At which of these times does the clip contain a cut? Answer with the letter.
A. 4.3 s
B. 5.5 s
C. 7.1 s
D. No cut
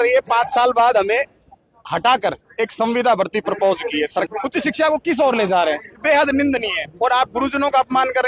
A